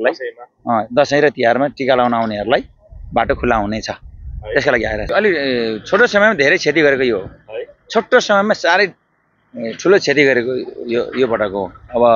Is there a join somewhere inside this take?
yes; 1 cut; at 5.0 s

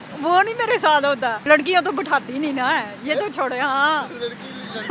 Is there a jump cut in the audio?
yes; 1 cut; at 1.4 s

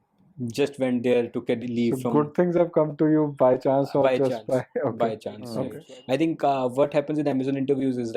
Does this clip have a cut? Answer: yes; 1 cut; at 5.6 s

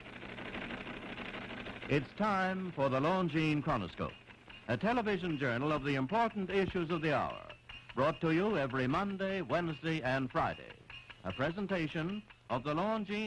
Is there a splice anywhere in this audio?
yes; 1 cut; at 2.5 s

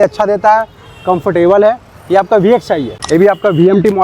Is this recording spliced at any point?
yes; 1 cut; at 2.9 s

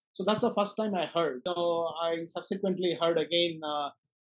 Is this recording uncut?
no; 1 cut; at 1.5 s

